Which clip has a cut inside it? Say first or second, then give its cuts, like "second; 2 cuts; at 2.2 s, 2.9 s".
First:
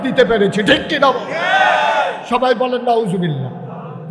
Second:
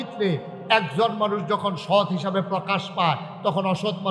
first; 1 cut; at 2.2 s